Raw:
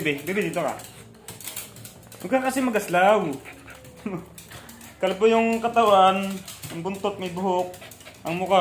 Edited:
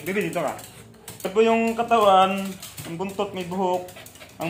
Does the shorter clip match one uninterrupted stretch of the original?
no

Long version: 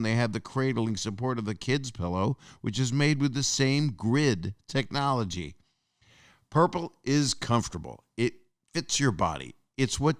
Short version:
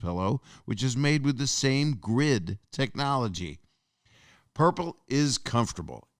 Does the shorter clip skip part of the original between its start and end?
no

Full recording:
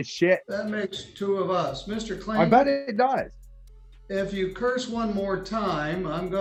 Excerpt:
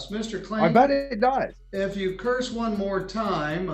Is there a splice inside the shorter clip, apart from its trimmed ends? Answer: yes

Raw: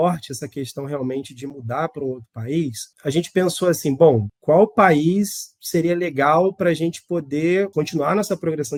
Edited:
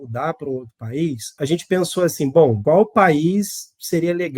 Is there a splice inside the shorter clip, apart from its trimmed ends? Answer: yes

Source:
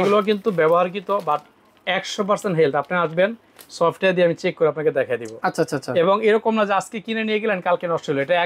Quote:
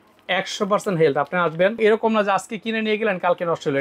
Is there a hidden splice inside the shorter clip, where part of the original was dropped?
yes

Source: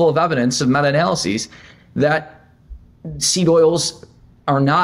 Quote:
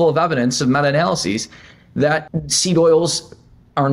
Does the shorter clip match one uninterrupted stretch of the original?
no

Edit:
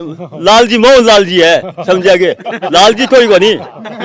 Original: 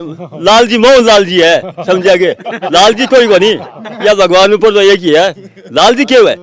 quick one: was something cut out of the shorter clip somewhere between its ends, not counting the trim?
no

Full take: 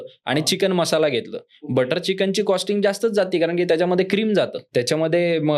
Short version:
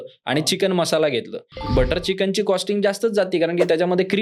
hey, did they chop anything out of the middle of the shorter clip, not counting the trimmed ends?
no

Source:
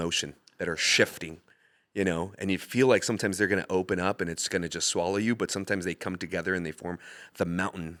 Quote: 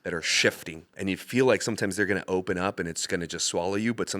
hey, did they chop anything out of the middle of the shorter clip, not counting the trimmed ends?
yes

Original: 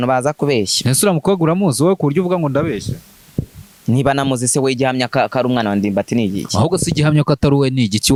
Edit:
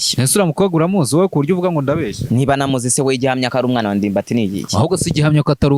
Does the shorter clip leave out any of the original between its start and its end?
yes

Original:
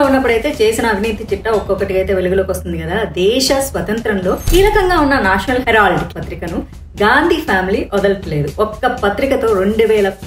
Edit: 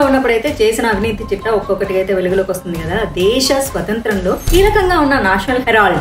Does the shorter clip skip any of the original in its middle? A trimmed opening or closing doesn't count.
no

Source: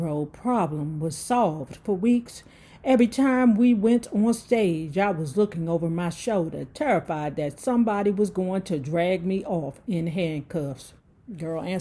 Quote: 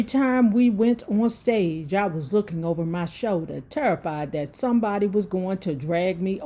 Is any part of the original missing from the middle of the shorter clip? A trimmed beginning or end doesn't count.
no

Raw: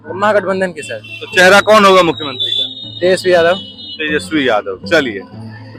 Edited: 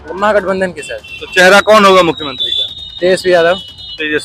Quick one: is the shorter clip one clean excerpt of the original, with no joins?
yes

